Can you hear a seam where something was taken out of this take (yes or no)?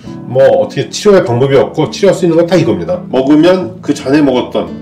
yes